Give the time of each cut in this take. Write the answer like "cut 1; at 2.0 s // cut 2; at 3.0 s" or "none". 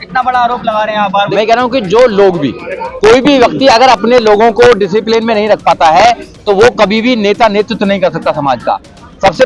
cut 1; at 1.3 s